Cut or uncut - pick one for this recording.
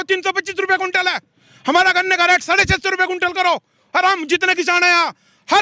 uncut